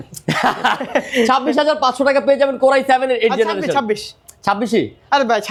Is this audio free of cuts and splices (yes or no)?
yes